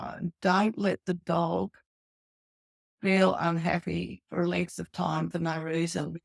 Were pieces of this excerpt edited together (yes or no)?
no